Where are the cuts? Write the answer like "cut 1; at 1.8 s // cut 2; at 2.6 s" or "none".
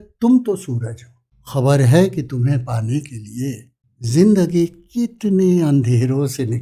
none